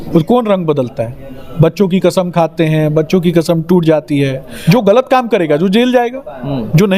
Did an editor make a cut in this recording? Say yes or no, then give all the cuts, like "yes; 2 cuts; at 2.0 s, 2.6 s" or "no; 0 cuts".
yes; 1 cut; at 4.7 s